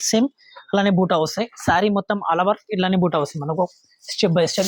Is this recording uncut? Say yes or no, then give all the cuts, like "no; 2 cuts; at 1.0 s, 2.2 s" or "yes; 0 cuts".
yes; 0 cuts